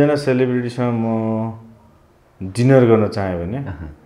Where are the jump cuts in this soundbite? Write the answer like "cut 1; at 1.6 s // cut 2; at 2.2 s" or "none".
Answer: none